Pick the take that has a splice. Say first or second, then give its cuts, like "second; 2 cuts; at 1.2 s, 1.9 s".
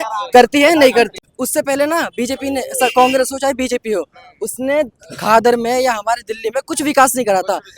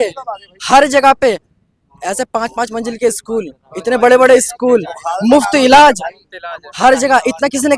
first; 1 cut; at 1.2 s